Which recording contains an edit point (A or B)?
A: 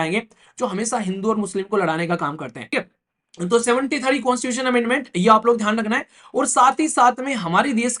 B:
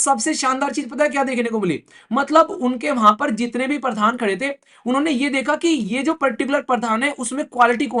A